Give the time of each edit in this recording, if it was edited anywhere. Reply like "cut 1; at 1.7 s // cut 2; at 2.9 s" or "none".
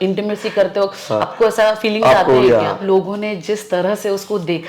cut 1; at 2.8 s